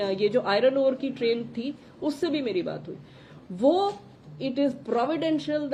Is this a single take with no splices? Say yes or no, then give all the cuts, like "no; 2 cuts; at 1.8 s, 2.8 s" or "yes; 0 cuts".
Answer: yes; 0 cuts